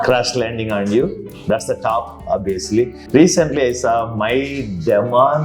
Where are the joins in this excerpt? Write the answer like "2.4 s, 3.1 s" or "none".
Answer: 3.0 s